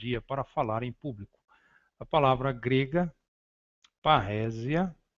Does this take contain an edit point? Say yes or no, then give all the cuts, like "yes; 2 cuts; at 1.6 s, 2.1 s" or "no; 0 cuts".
yes; 1 cut; at 1.0 s